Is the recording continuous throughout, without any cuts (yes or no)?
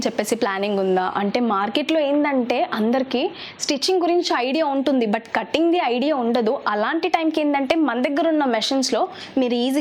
yes